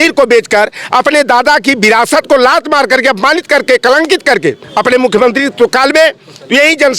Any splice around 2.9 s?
no; 1 cut; at 4.6 s

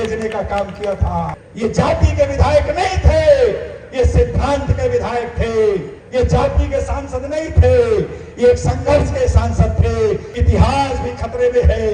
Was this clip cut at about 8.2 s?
no; 3 cuts; at 1.4 s, 6.0 s, 10.3 s

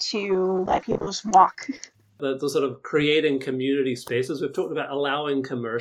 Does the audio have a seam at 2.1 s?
yes; 1 cut; at 2.1 s

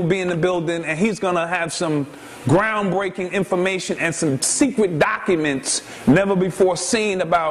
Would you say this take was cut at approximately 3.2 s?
yes; 1 cut; at 3.2 s

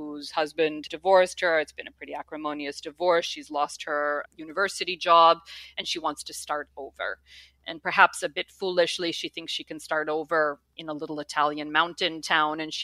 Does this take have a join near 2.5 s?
no; 2 cuts; at 0.8 s, 4.2 s

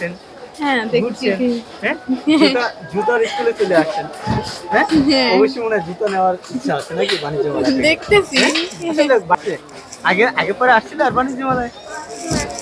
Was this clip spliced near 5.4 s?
no; 1 cut; at 9.4 s

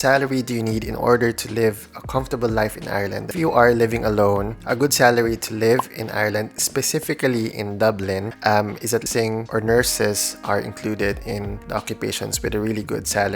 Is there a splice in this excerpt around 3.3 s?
yes; 2 cuts; at 3.3 s, 9.1 s

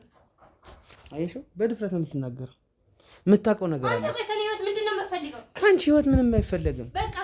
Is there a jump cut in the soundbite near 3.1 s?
no; 0 cuts

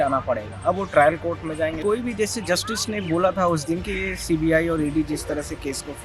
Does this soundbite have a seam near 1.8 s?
yes; 1 cut; at 1.8 s

